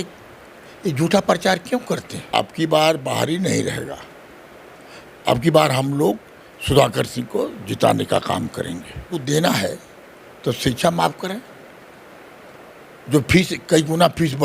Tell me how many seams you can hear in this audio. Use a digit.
2